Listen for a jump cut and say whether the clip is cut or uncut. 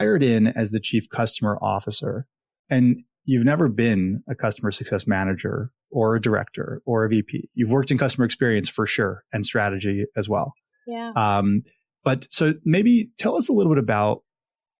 uncut